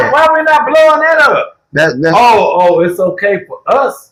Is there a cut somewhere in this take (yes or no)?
no